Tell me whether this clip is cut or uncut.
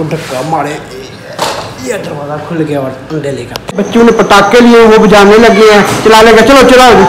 cut